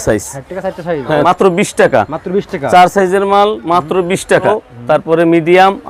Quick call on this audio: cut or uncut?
cut